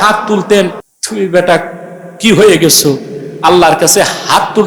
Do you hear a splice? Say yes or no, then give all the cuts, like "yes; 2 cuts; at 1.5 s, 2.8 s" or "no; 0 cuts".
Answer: yes; 1 cut; at 0.9 s